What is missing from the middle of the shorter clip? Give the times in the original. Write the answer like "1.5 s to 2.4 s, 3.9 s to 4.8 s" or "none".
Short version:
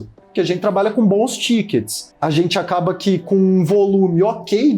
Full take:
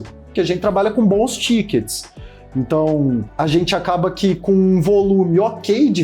2.1 s to 3.3 s